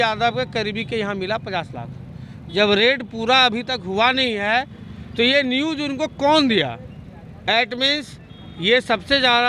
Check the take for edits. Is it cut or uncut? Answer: uncut